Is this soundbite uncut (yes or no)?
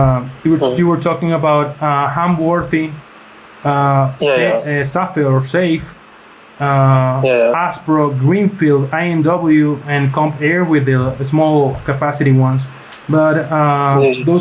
yes